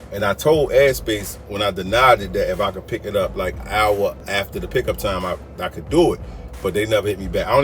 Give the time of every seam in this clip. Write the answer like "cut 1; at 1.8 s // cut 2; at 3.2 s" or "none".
cut 1; at 3.6 s // cut 2; at 4.2 s

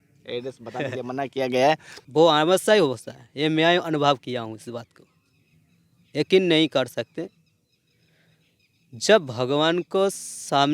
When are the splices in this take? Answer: cut 1; at 1.9 s

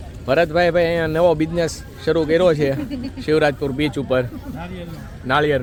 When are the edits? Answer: none

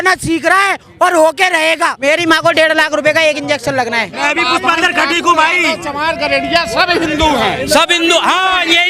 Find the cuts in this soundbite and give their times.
cut 1; at 2.1 s // cut 2; at 4.1 s

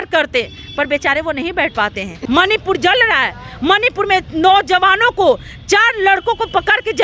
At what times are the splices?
cut 1; at 2.1 s

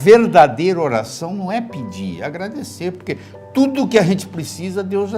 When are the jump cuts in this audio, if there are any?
none

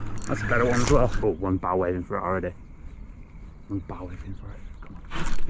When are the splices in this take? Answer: cut 1; at 1.2 s

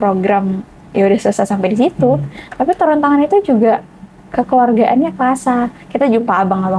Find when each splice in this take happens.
none

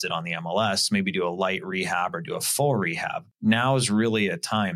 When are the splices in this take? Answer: cut 1; at 3.2 s

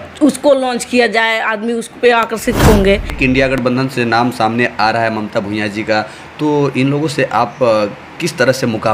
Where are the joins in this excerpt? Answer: cut 1; at 3.1 s

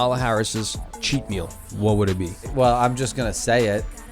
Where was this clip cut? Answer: cut 1; at 1.6 s // cut 2; at 2.5 s

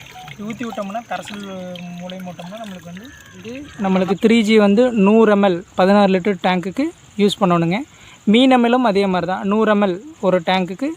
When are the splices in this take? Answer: cut 1; at 3.7 s

